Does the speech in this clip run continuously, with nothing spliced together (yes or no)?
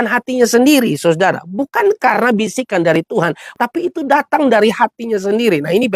no